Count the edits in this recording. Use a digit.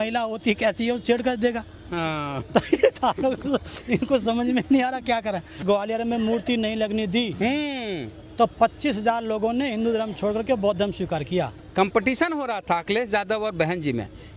2